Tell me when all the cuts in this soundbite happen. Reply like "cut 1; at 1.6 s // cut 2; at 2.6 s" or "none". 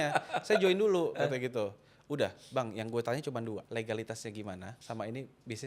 cut 1; at 3.7 s // cut 2; at 4.7 s